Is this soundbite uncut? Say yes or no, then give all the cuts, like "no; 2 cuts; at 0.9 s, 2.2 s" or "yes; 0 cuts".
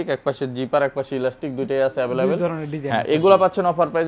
yes; 0 cuts